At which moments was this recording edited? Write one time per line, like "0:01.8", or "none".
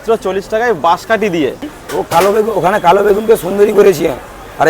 0:02.2